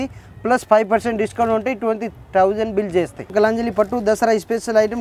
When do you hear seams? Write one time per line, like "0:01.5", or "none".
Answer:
0:03.3

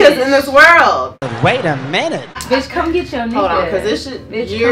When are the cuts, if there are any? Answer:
0:02.4

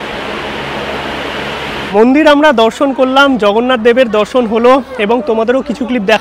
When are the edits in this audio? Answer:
0:01.9

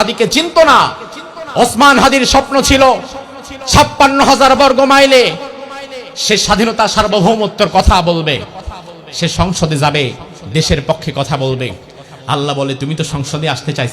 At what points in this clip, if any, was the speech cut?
none

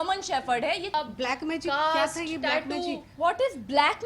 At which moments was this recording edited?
0:00.9

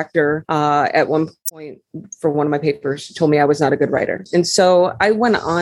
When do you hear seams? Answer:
0:04.2

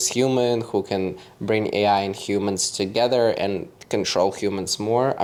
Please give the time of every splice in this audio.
none

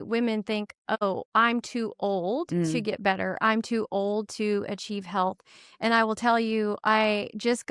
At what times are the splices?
none

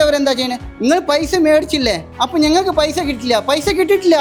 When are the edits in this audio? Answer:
none

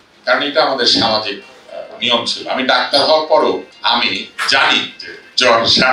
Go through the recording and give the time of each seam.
0:03.7

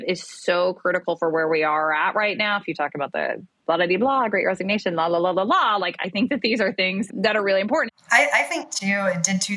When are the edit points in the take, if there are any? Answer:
0:07.1
0:07.9

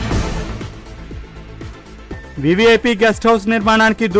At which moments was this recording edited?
0:02.3

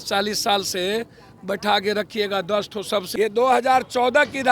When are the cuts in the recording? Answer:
0:03.1

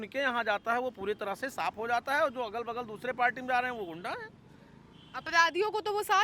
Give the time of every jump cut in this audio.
none

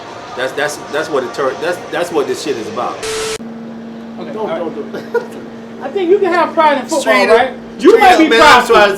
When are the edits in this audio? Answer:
0:03.2

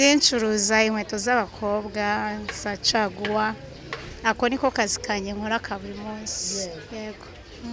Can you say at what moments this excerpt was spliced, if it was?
none

